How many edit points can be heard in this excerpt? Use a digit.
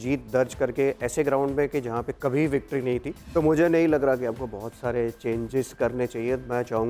1